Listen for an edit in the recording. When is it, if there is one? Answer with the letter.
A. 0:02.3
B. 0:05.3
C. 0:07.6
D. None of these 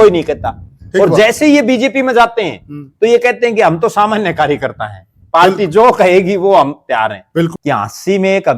C